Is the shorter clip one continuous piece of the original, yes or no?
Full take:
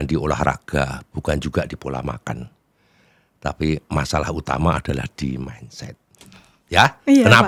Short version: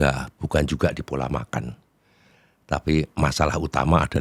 yes